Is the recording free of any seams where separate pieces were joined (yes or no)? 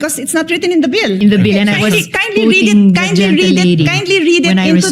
no